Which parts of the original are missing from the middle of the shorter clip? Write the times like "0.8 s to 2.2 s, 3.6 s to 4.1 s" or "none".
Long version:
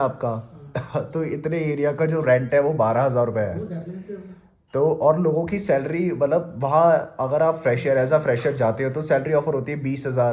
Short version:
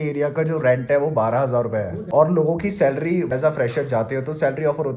3.7 s to 5.0 s, 6.2 s to 8.0 s